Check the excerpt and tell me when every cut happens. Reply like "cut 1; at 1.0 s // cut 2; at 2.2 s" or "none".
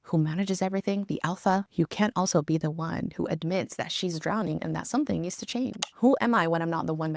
cut 1; at 5.8 s